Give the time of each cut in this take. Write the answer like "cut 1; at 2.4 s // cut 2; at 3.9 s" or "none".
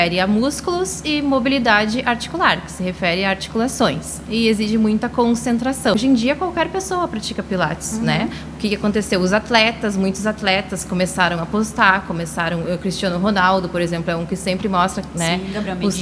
cut 1; at 5.9 s